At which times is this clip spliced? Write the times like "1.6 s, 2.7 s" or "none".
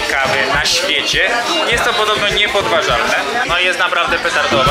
3.5 s